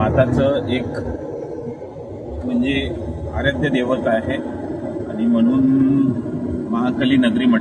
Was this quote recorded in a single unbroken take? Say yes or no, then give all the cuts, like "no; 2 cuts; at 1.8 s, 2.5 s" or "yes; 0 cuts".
yes; 0 cuts